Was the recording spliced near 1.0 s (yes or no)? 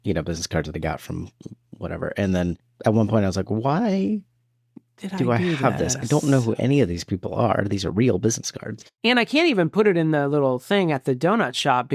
no